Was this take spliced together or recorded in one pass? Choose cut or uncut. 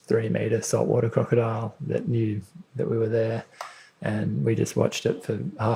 uncut